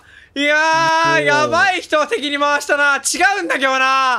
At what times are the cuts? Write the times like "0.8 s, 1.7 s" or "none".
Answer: none